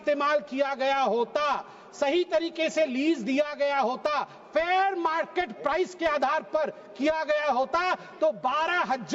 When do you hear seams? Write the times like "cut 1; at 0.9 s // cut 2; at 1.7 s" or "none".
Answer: none